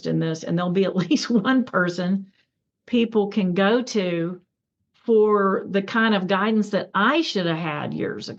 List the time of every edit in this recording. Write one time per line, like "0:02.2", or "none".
none

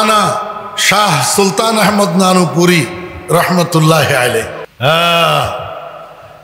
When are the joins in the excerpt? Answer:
0:04.6

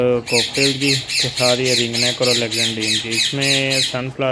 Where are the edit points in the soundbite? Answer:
none

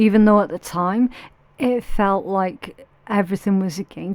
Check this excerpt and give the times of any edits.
none

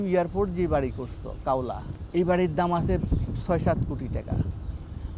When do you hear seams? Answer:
0:01.9

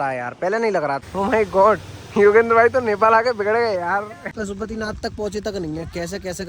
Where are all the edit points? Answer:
0:01.0
0:04.3

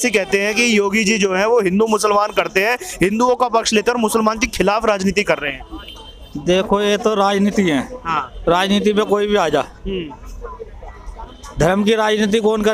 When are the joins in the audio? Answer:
none

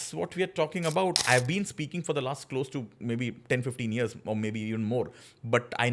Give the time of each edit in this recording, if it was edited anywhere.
0:01.1

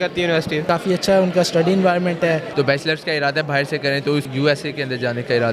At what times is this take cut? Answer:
0:02.5
0:04.2

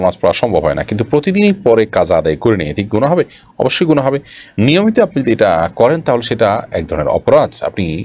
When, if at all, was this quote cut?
none

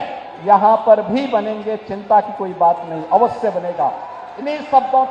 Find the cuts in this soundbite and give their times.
none

